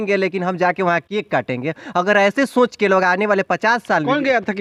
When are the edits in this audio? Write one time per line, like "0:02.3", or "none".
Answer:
none